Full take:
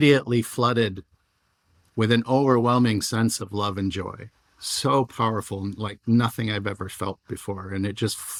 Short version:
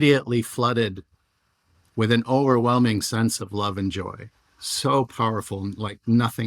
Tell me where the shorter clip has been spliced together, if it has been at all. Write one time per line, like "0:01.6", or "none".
none